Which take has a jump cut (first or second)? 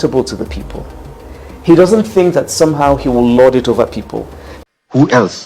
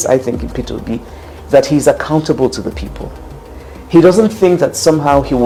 first